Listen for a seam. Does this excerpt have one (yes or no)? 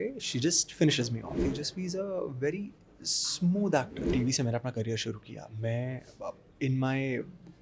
yes